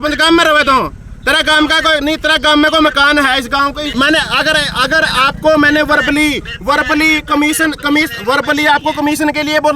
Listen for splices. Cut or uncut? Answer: cut